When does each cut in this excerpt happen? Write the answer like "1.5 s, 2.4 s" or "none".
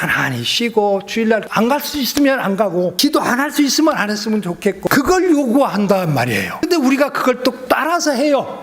1.4 s, 2.9 s, 4.9 s, 6.6 s, 7.6 s